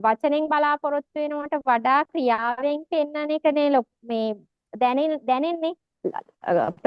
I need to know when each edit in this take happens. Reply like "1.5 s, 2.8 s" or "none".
5.9 s